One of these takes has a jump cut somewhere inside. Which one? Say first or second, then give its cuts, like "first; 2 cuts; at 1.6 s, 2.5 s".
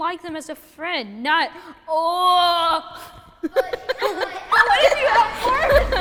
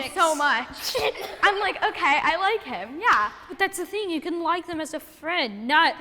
second; 2 cuts; at 1.3 s, 3.5 s